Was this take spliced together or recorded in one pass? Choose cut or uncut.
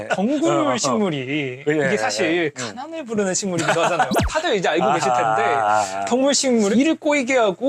uncut